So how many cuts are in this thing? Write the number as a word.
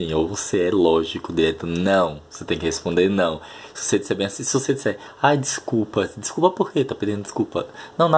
zero